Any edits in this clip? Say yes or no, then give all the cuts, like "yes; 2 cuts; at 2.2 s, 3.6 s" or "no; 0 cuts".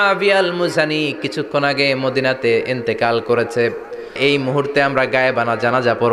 yes; 1 cut; at 4.2 s